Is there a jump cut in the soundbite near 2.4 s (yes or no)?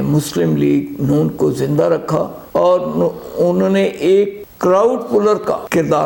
no